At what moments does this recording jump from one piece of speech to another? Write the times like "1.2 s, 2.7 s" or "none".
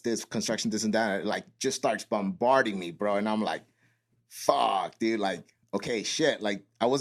none

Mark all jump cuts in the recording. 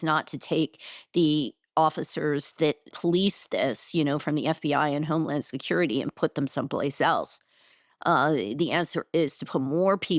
2.9 s

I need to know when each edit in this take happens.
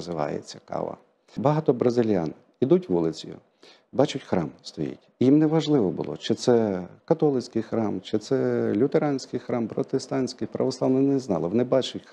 1.4 s

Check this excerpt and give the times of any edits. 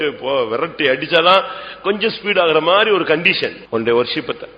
3.6 s

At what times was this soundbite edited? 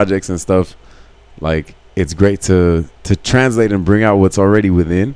2.9 s

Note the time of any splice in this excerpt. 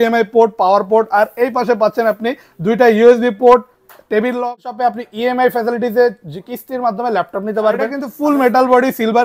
4.4 s, 8.0 s

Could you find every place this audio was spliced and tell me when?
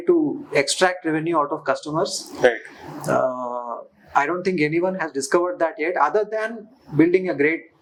none

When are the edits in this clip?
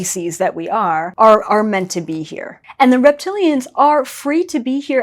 1.1 s, 2.6 s

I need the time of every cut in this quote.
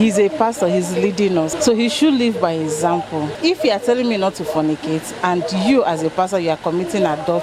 1.5 s, 3.3 s

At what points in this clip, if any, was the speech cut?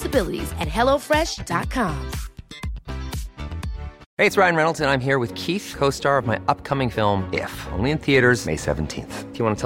4.0 s

